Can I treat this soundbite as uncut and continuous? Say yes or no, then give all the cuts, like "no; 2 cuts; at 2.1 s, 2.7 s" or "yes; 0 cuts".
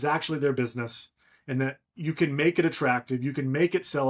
yes; 0 cuts